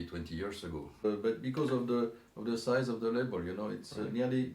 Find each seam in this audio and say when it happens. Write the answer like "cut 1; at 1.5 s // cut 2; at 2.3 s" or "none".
cut 1; at 1.0 s